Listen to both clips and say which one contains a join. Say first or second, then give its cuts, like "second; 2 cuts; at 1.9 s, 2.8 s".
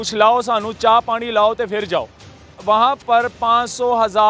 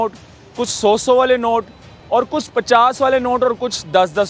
first; 1 cut; at 2.5 s